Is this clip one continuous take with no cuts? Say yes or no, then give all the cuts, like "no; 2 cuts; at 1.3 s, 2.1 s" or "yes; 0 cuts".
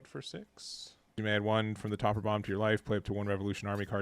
no; 1 cut; at 1.2 s